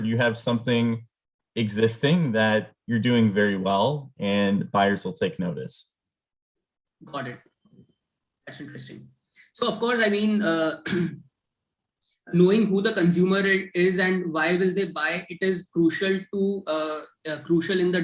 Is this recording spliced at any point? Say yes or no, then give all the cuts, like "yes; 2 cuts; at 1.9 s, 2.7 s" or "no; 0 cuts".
no; 0 cuts